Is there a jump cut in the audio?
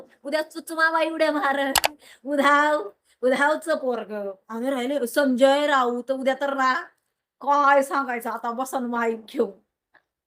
no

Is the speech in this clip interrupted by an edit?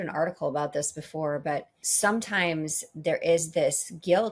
yes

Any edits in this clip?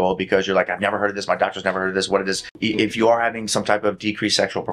yes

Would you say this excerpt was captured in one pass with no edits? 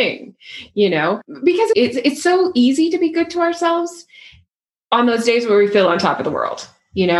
no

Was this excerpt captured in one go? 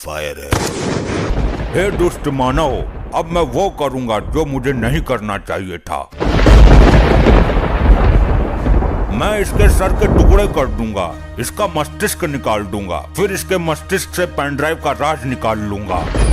no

